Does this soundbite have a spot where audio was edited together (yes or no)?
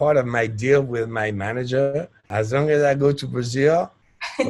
yes